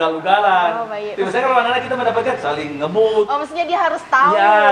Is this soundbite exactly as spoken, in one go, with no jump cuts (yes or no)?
yes